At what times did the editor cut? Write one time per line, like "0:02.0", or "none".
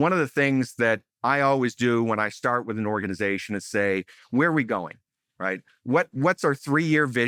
none